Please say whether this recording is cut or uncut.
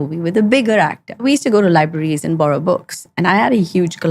cut